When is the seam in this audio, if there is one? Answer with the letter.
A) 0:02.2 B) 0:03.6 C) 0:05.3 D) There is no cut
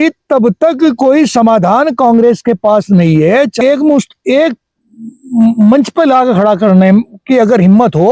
B